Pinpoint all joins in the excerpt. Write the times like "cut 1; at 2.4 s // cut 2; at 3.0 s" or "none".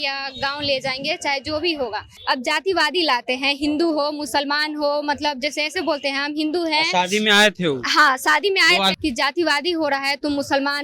cut 1; at 2.1 s // cut 2; at 8.9 s